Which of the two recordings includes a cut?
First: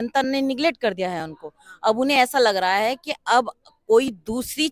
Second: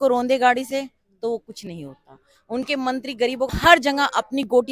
second; 1 cut; at 3.5 s

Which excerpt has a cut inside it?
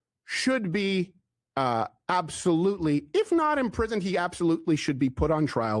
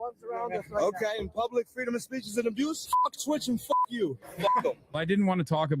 second; 2 cuts; at 2.8 s, 5.0 s

